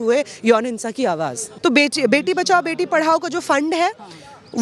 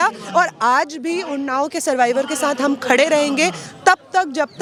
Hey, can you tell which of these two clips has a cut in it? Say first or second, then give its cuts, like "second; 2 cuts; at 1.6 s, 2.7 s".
first; 1 cut; at 1.4 s